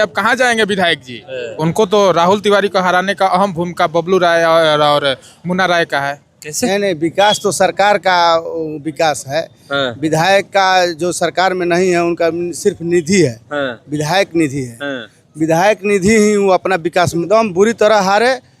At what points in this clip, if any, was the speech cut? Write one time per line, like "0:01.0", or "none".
0:01.4
0:06.7
0:17.2